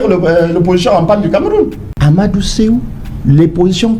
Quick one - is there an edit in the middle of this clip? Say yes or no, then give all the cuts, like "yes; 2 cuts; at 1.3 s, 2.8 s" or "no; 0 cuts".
yes; 1 cut; at 1.8 s